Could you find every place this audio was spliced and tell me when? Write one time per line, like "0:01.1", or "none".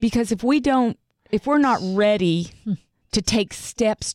0:01.1
0:02.9